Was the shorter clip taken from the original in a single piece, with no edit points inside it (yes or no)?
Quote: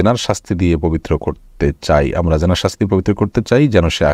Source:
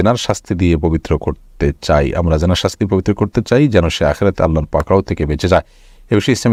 yes